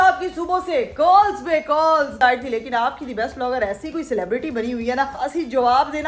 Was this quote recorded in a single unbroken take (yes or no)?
no